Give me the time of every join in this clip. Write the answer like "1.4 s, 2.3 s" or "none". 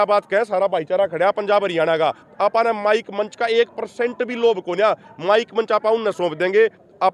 none